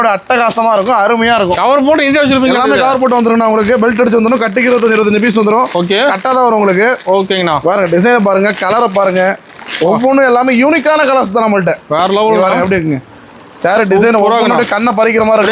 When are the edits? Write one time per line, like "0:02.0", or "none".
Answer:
none